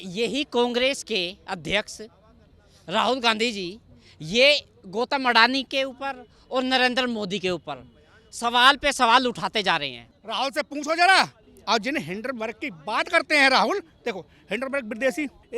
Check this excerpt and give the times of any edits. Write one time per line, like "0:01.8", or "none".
0:10.0